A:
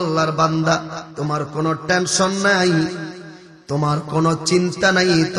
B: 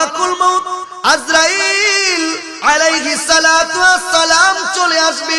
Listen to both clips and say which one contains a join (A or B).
A